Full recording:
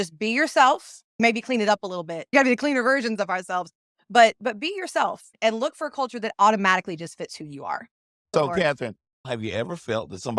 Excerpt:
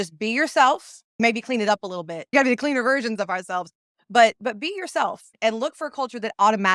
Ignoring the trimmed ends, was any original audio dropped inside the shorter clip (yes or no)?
no